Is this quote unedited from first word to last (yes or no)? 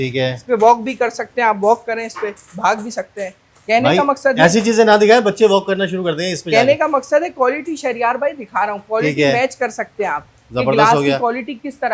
yes